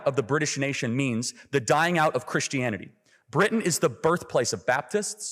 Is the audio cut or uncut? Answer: uncut